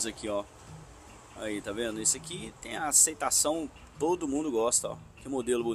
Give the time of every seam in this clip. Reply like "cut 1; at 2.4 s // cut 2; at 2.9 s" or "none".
none